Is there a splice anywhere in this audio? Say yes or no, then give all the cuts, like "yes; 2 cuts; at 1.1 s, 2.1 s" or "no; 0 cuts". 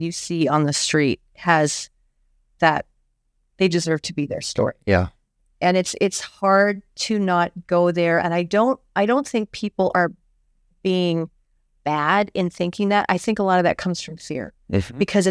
no; 0 cuts